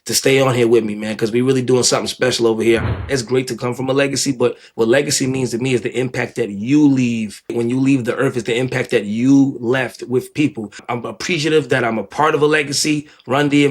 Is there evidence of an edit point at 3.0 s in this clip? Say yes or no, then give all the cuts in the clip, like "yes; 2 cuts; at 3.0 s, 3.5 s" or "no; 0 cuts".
yes; 3 cuts; at 3.0 s, 7.5 s, 10.8 s